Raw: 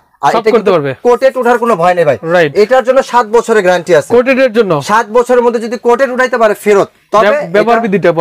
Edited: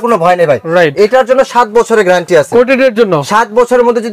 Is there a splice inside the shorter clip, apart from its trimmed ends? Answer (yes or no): no